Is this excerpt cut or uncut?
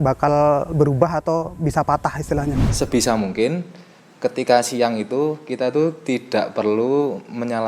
cut